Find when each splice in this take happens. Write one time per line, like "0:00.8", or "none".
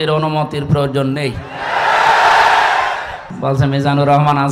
0:03.3